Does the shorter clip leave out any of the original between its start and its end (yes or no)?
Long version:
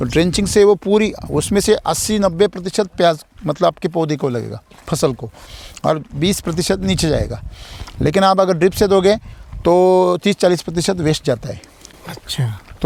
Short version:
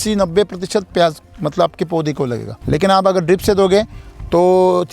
yes